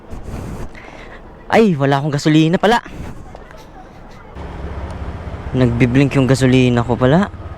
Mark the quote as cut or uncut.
cut